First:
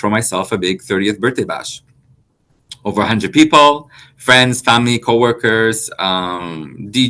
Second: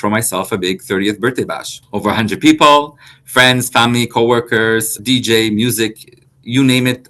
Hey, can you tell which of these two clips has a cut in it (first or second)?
second